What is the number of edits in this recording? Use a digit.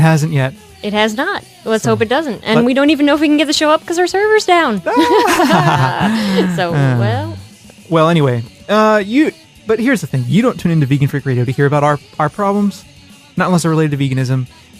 1